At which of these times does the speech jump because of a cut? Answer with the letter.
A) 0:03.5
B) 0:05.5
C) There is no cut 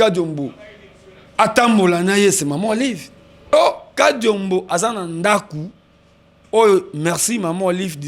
A